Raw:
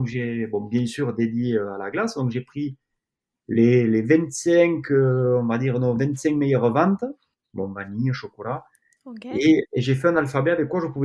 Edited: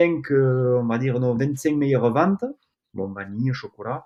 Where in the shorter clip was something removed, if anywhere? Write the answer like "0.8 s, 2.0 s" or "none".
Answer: none